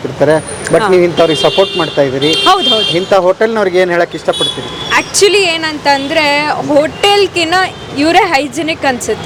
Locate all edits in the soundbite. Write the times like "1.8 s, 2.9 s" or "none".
none